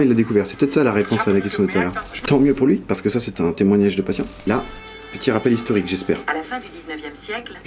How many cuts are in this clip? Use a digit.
2